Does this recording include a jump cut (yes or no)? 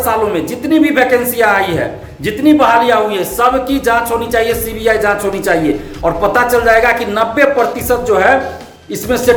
no